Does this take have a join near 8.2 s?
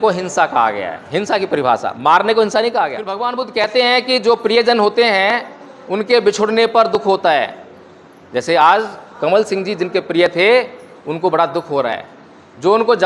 no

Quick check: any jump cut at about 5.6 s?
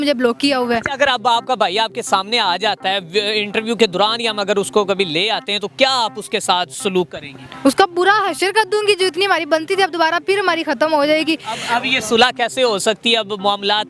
no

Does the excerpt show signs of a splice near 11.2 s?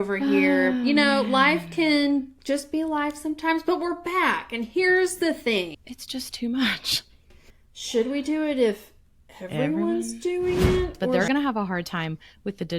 yes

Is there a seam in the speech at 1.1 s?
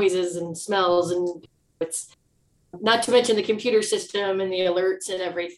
no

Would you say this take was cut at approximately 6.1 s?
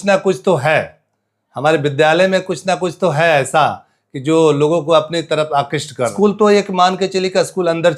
yes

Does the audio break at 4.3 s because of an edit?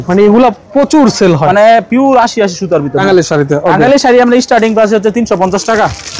no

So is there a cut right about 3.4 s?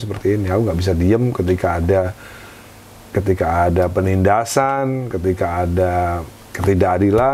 no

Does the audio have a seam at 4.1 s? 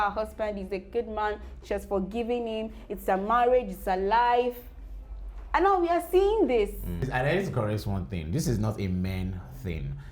no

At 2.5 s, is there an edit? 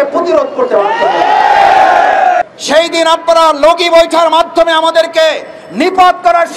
yes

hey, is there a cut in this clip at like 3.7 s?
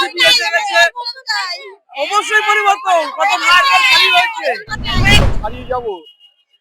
no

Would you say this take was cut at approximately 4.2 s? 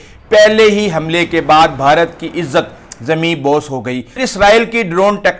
yes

